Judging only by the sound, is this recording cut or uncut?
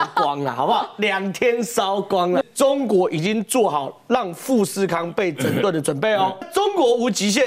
cut